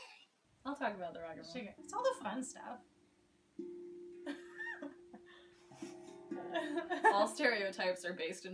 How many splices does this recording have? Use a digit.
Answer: 1